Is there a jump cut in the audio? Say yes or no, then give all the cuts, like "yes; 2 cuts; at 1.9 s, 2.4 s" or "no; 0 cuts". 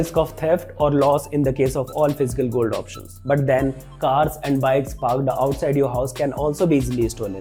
no; 0 cuts